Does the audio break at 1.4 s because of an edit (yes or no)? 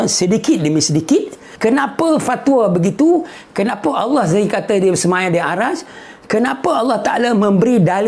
yes